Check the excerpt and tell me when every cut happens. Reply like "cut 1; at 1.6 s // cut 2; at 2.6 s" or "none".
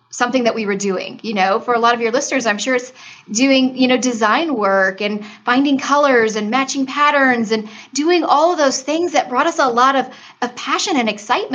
none